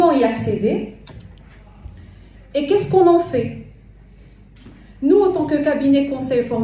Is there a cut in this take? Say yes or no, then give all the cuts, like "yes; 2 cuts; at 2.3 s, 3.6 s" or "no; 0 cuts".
no; 0 cuts